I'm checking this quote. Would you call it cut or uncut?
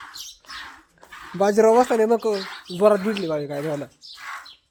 uncut